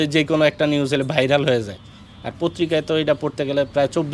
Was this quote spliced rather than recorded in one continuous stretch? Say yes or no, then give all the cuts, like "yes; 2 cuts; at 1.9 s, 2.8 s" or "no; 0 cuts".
no; 0 cuts